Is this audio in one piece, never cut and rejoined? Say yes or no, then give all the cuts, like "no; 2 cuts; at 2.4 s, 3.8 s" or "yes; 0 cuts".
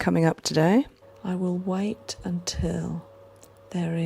no; 1 cut; at 1.1 s